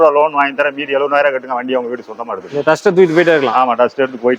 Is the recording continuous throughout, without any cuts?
yes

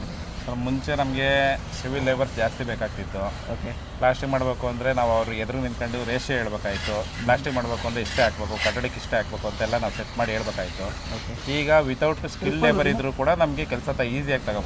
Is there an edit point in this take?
no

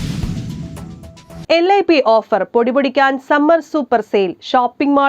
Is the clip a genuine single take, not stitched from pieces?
no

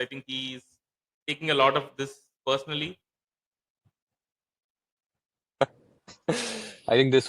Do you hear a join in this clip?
no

